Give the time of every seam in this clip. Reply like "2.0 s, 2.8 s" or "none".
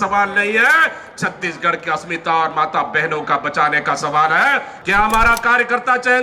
4.7 s